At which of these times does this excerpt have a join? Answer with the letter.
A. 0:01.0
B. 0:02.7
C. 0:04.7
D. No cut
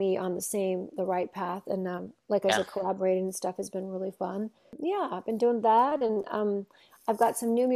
C